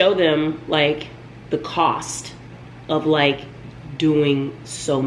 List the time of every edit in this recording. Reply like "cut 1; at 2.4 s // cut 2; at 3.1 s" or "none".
none

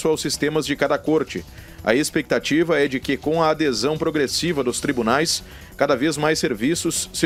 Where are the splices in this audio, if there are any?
none

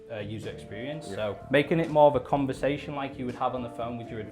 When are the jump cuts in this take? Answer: cut 1; at 1.4 s

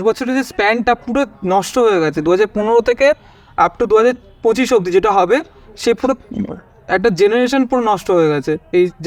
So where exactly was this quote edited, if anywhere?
none

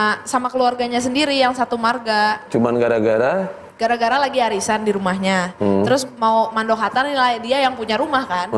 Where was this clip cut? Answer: none

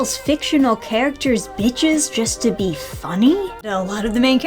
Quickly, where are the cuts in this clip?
cut 1; at 3.6 s

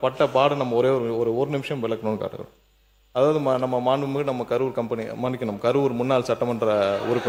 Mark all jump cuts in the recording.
none

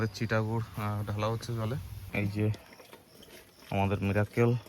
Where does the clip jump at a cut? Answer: cut 1; at 2.0 s

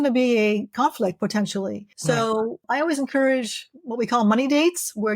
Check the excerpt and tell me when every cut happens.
cut 1; at 1.9 s // cut 2; at 2.6 s

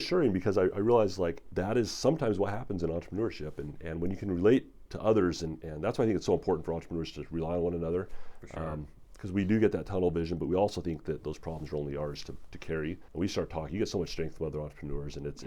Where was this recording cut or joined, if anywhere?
cut 1; at 1.4 s // cut 2; at 13.0 s

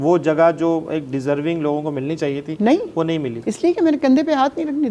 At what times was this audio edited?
none

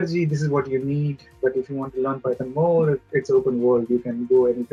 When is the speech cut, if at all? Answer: none

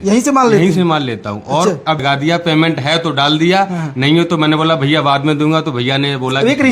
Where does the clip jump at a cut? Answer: cut 1; at 2.0 s

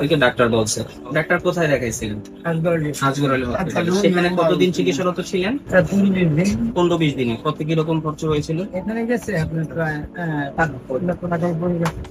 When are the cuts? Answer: none

